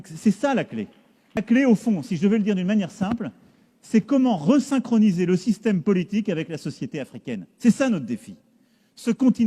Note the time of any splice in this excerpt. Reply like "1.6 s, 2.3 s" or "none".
1.4 s